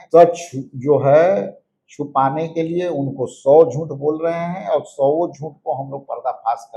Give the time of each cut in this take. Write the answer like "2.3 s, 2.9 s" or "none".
none